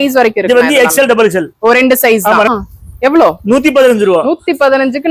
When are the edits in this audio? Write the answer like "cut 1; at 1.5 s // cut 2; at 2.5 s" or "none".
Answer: cut 1; at 2.5 s